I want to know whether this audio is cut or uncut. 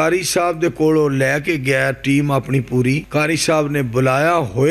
cut